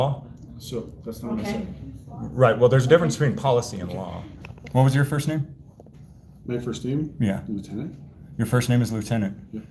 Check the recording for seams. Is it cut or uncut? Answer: cut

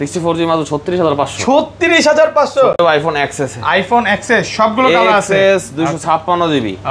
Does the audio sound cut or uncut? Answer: cut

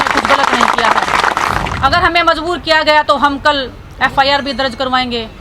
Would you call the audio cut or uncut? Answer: cut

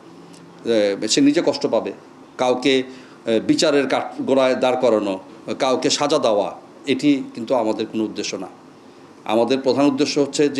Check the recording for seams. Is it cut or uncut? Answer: cut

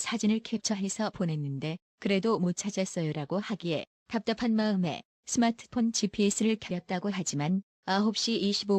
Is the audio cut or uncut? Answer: uncut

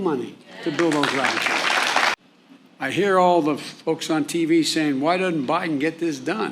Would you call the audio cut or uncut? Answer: cut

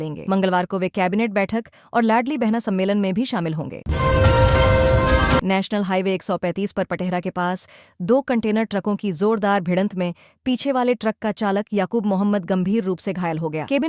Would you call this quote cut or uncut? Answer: cut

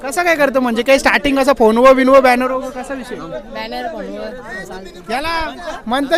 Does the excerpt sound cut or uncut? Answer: uncut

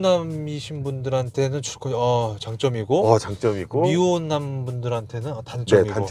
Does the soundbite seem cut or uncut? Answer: uncut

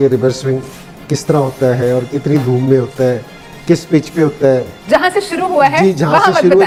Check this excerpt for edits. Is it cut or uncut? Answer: uncut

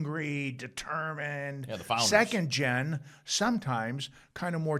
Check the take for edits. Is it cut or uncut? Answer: uncut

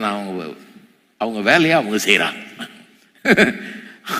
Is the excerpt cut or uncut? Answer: uncut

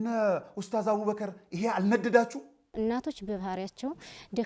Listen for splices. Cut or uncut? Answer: cut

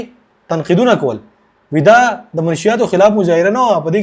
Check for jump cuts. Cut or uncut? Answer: uncut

